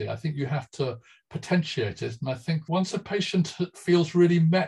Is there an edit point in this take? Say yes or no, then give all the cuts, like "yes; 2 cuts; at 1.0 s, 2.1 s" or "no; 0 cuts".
yes; 1 cut; at 2.6 s